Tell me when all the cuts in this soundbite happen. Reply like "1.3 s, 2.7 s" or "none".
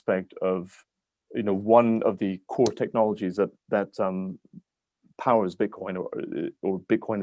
none